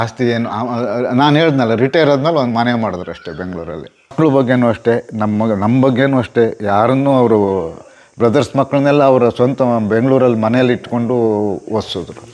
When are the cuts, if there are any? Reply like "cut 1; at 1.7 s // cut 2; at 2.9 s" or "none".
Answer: cut 1; at 4.1 s

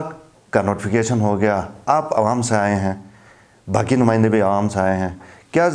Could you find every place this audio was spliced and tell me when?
none

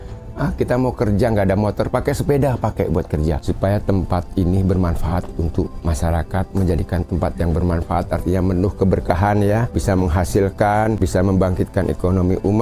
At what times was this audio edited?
cut 1; at 3.4 s // cut 2; at 9.7 s // cut 3; at 11.0 s

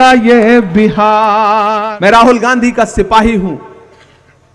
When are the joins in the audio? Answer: cut 1; at 1.7 s

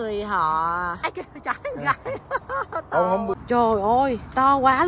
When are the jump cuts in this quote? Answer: cut 1; at 1.0 s // cut 2; at 3.4 s

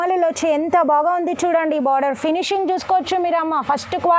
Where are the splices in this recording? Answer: none

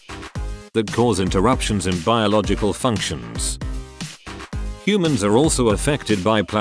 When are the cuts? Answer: cut 1; at 3.3 s

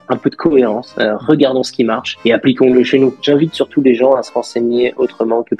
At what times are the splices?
cut 1; at 3.2 s

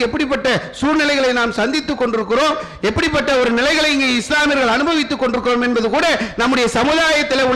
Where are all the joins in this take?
none

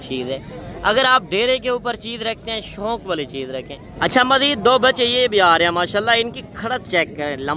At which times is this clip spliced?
cut 1; at 3.8 s

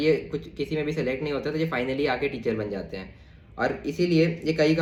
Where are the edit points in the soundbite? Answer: none

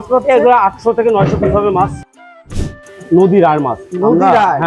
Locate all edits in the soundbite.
cut 1; at 2.5 s

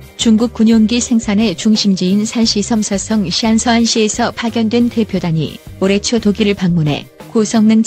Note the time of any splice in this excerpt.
none

